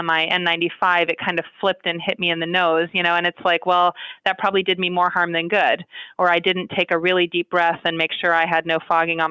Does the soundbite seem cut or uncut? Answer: uncut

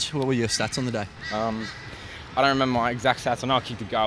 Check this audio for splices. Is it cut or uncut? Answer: uncut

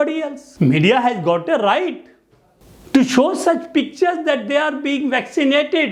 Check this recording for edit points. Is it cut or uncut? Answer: uncut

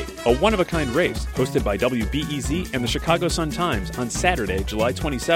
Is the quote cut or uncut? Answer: uncut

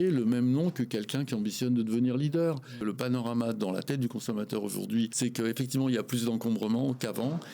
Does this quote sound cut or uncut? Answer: cut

